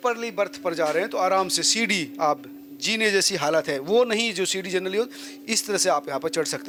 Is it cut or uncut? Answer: uncut